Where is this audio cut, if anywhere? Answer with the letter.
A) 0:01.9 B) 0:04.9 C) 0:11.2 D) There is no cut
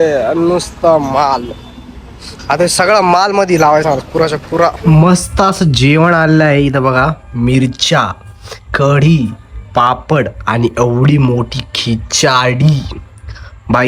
B